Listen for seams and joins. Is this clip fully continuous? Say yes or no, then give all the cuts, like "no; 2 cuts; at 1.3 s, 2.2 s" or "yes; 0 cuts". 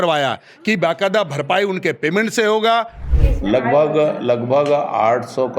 no; 1 cut; at 3.1 s